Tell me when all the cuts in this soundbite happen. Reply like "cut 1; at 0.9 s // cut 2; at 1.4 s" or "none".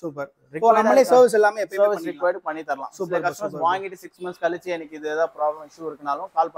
none